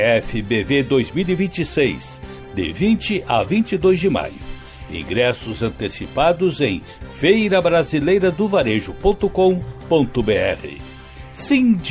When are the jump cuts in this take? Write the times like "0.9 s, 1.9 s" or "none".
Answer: none